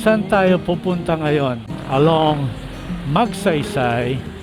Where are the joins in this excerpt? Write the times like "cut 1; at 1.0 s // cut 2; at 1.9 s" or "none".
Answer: cut 1; at 1.7 s